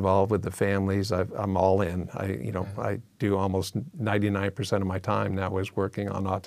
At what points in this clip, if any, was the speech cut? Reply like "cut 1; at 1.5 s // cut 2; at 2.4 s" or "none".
none